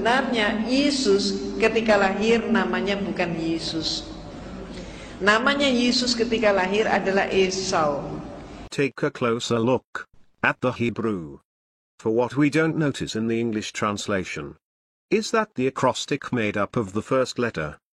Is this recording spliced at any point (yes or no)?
yes